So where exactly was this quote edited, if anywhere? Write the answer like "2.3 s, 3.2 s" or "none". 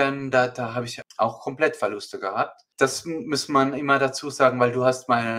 1.0 s, 2.6 s